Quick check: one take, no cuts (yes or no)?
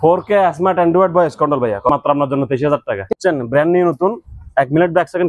no